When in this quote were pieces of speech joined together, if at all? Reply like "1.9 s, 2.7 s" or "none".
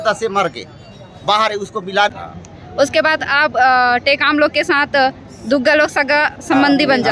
2.1 s